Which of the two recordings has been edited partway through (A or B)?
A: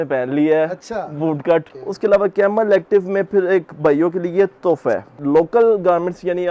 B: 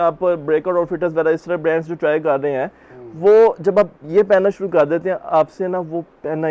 A